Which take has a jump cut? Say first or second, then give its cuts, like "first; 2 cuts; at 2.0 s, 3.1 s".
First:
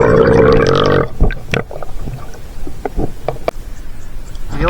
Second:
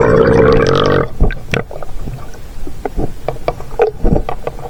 first; 1 cut; at 3.5 s